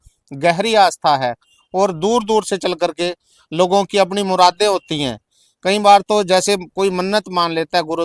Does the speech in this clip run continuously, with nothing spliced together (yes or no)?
yes